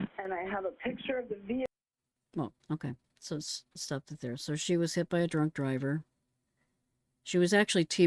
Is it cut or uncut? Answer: uncut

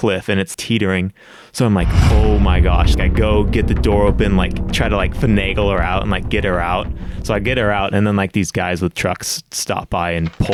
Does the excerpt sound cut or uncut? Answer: uncut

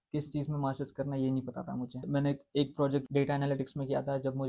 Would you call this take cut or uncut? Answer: uncut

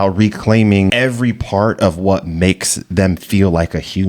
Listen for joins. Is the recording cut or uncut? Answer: cut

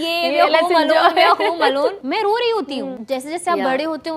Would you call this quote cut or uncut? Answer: cut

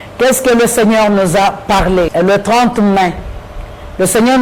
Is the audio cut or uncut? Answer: cut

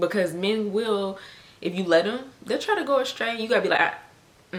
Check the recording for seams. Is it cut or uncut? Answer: uncut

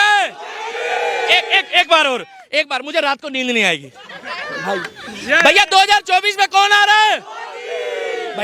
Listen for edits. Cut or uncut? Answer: uncut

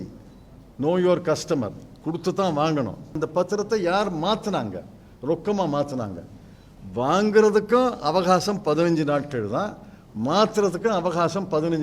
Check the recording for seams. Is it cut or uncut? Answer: cut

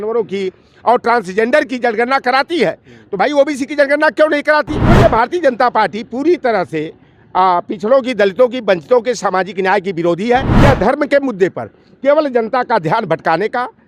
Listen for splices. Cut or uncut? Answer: cut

